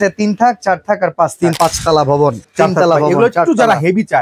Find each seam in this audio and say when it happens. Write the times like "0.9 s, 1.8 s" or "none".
1.5 s

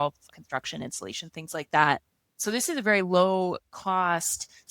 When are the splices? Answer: 2.4 s

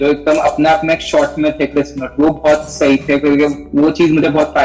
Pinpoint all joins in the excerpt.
none

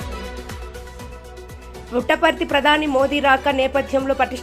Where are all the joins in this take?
0.9 s

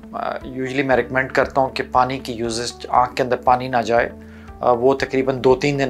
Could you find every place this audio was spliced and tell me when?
none

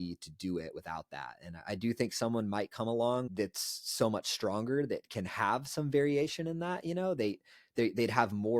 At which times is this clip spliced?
3.3 s

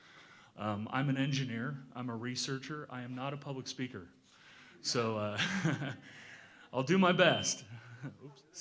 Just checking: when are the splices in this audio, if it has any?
none

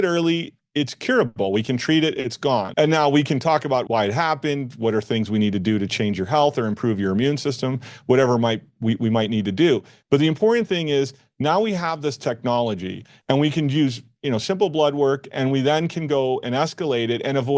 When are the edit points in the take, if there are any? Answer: 2.7 s, 3.9 s

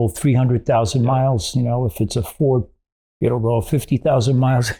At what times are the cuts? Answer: none

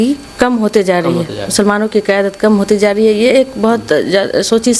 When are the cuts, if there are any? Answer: none

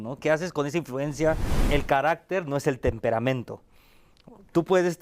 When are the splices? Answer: 1.5 s

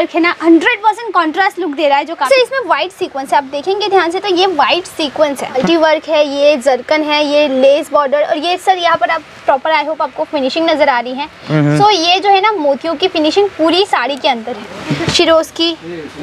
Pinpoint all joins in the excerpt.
2.3 s, 5.6 s, 14.8 s

